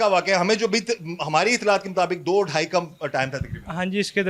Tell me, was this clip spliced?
no; 0 cuts

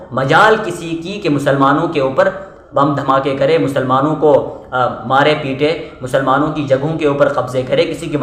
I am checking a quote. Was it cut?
no; 0 cuts

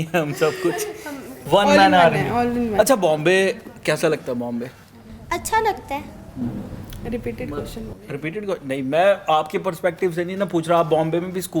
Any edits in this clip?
no; 0 cuts

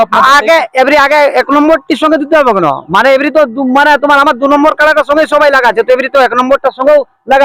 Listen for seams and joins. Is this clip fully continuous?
yes; 0 cuts

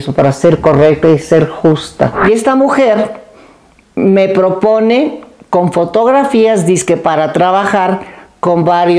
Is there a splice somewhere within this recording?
yes; 1 cut; at 2.2 s

